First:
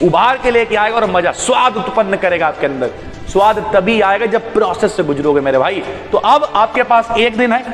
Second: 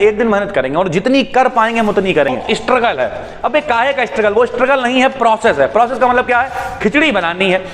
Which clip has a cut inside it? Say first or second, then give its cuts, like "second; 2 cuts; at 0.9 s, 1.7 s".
second; 1 cut; at 2.4 s